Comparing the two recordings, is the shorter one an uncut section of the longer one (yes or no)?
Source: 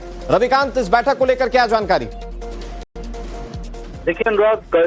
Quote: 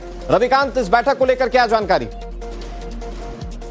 no